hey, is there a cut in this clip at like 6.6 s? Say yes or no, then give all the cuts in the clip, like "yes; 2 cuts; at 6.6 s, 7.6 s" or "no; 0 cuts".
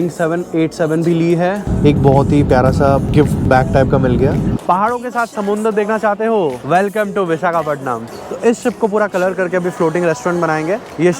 yes; 5 cuts; at 1.7 s, 3.1 s, 4.6 s, 6.6 s, 8.1 s